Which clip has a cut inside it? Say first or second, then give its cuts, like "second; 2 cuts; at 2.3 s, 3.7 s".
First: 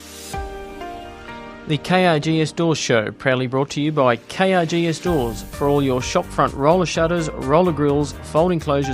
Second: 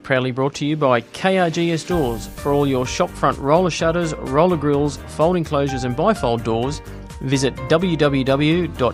first; 1 cut; at 1.6 s